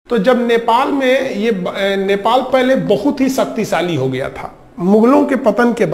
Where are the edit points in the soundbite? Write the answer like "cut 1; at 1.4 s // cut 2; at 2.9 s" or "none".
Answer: none